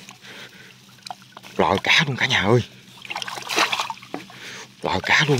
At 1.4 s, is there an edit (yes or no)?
yes